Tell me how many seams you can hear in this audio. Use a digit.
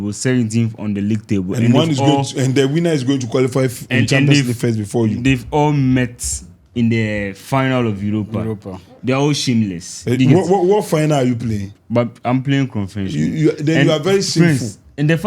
0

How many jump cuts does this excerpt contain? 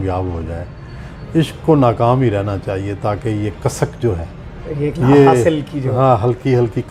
0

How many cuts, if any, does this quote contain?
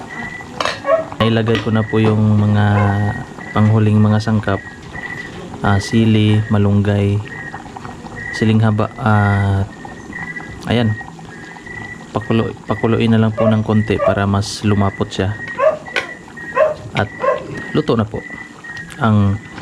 1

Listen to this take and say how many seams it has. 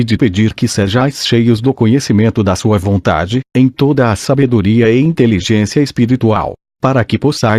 1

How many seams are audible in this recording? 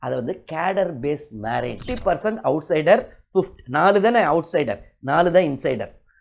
1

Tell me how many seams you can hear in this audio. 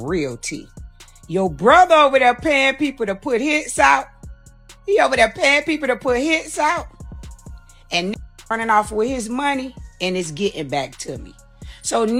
0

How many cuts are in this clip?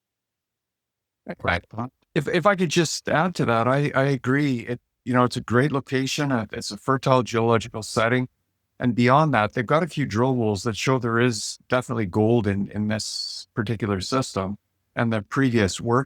1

